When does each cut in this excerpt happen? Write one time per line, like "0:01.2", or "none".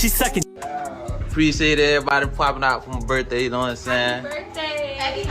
none